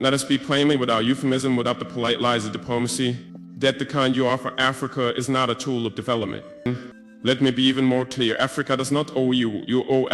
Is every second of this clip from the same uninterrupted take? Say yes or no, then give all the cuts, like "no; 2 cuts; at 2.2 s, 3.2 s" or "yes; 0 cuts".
no; 1 cut; at 6.7 s